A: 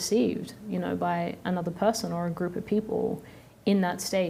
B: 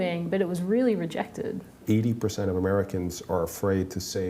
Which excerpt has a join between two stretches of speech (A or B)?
B